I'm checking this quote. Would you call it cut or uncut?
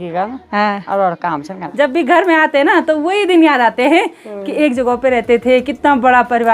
cut